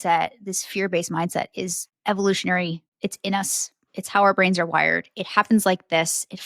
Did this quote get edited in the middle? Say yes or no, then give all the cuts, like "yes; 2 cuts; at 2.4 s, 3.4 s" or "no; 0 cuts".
yes; 2 cuts; at 1.9 s, 2.9 s